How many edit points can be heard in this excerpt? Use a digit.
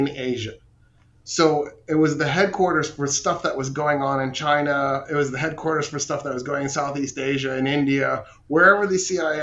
0